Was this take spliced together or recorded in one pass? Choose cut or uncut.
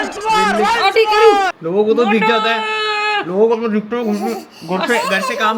uncut